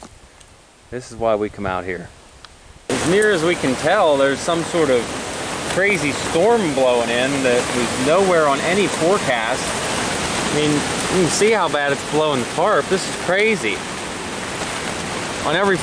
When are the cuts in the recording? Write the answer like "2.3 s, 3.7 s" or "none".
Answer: 2.9 s